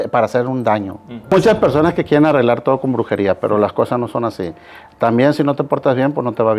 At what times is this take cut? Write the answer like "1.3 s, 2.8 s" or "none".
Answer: 1.3 s